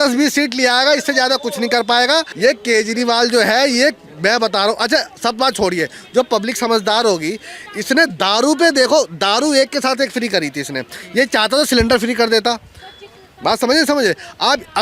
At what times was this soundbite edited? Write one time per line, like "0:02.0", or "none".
0:02.3